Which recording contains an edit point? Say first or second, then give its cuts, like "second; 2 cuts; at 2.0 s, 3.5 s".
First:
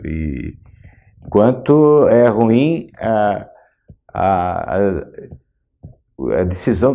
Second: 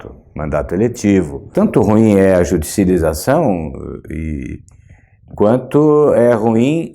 second; 1 cut; at 1.4 s